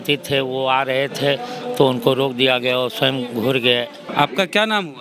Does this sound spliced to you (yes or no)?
yes